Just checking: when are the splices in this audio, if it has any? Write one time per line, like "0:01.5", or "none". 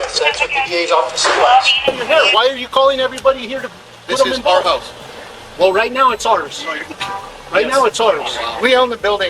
0:01.9